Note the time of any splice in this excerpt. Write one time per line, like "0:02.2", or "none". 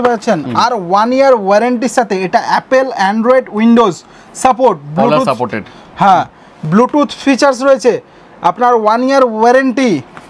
none